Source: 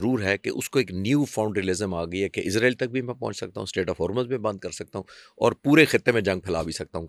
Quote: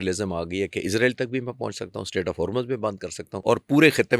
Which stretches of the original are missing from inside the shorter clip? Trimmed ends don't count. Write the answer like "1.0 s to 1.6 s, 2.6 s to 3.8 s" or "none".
4.9 s to 5.2 s